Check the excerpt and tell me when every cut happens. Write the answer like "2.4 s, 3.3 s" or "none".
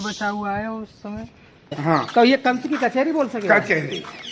1.8 s